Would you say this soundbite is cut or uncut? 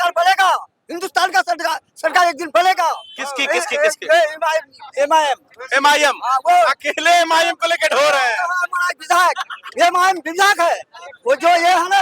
uncut